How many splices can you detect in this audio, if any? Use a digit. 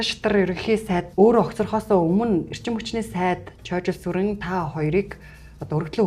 1